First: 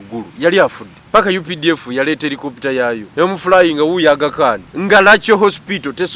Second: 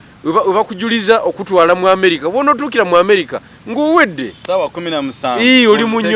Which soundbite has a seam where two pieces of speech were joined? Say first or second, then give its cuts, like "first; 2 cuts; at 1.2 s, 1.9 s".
first; 3 cuts; at 0.9 s, 3.0 s, 4.7 s